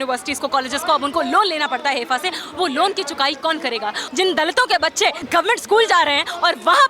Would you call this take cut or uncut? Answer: cut